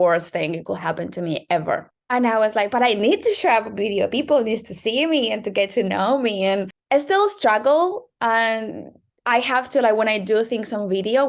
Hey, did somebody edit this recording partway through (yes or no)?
no